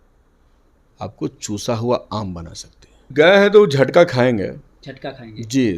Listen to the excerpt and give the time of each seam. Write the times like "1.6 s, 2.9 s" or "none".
3.0 s